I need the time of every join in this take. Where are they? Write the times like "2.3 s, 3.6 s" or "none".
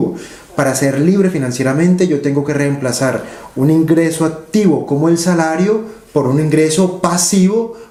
none